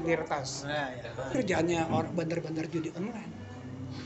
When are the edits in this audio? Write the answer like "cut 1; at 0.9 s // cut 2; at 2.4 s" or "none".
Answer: cut 1; at 1.3 s